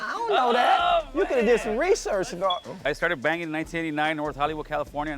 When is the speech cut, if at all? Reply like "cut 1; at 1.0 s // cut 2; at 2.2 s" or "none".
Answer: cut 1; at 2.8 s

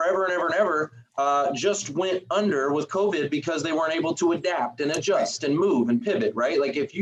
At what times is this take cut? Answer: none

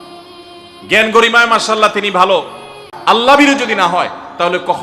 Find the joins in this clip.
cut 1; at 2.9 s

